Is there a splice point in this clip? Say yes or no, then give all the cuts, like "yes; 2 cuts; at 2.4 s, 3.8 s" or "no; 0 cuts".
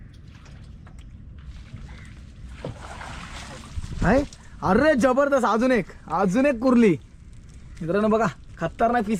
no; 0 cuts